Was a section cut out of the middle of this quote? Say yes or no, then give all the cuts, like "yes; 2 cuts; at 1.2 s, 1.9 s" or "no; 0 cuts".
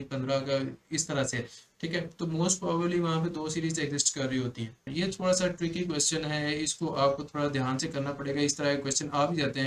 yes; 1 cut; at 4.9 s